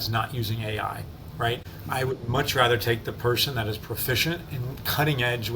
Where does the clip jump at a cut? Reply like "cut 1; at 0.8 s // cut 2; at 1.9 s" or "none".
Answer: cut 1; at 1.7 s